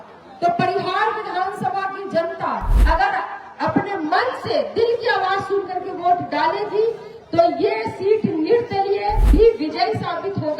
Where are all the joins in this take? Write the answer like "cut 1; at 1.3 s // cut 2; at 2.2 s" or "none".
cut 1; at 2.7 s // cut 2; at 9.2 s